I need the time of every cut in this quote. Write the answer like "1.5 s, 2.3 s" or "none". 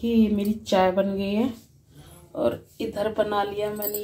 none